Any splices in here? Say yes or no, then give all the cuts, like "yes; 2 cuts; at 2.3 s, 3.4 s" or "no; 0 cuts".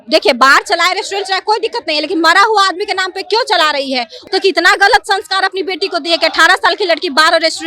yes; 1 cut; at 4.2 s